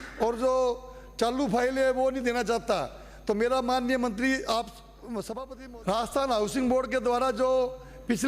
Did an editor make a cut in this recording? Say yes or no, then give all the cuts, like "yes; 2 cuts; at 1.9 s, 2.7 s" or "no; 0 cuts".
yes; 1 cut; at 5.3 s